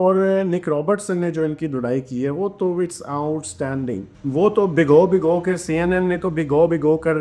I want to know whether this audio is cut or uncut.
uncut